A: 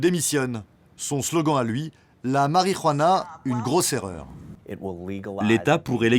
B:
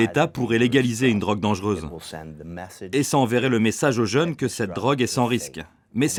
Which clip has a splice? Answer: A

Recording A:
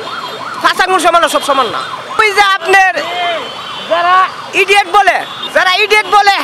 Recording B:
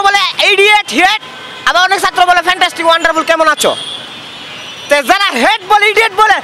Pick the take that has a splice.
A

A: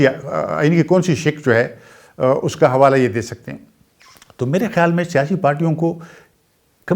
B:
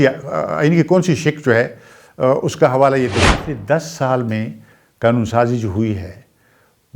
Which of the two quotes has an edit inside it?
B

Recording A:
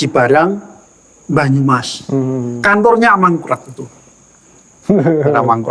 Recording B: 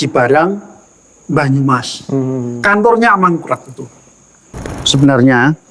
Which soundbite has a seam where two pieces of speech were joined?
B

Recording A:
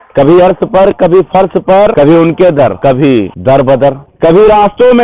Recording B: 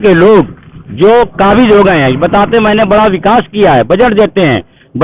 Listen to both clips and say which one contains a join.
A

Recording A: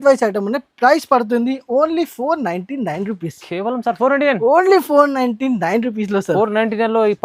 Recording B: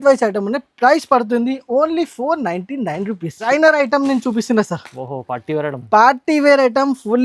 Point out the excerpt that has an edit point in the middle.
B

